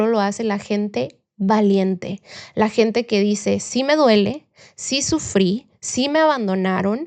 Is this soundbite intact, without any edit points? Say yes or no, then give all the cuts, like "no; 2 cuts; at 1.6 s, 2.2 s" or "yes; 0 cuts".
yes; 0 cuts